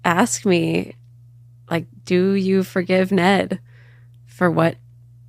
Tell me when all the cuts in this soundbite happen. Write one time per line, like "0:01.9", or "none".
none

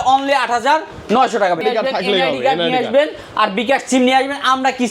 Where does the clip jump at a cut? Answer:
0:01.6

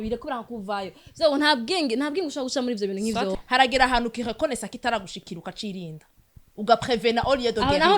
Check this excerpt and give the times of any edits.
0:03.3

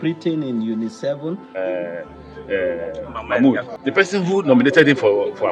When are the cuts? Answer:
0:01.6
0:03.7

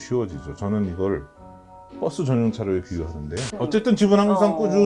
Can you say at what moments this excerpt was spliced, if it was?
0:03.5

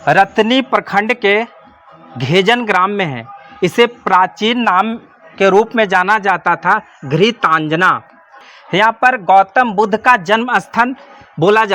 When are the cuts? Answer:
0:08.5

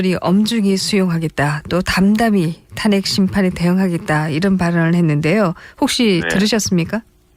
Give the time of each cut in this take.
none

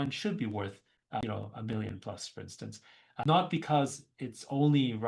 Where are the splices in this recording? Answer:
0:01.2
0:03.2

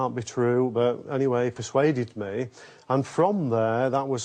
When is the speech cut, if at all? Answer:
none

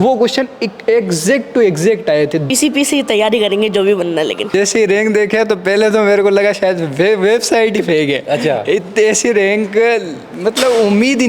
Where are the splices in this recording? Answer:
0:02.4
0:04.5

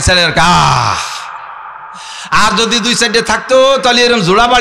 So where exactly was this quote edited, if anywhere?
none

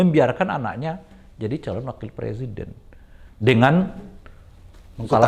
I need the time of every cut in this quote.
none

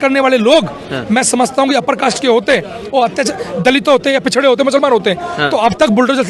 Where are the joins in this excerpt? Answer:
none

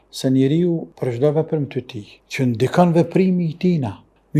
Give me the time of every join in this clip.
0:00.9

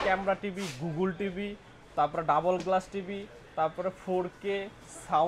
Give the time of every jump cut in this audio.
none

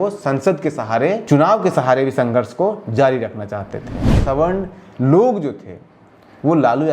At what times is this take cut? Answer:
0:01.2
0:04.2

